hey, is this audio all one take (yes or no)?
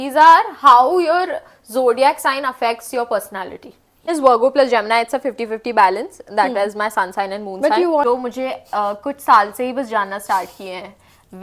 no